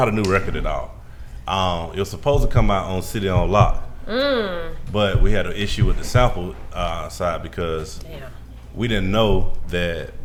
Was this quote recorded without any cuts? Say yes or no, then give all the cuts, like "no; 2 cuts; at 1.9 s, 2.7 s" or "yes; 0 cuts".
yes; 0 cuts